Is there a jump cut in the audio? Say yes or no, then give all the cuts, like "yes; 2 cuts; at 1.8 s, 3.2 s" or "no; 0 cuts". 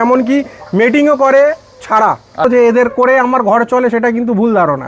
yes; 1 cut; at 2.4 s